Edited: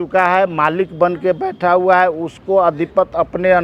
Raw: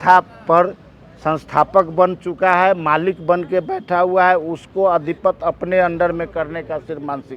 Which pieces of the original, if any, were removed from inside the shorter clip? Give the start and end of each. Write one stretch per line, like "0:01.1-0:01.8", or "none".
none